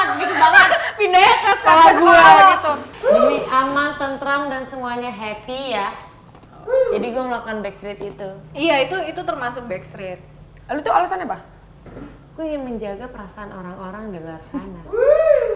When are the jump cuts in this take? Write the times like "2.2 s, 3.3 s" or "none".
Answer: 2.9 s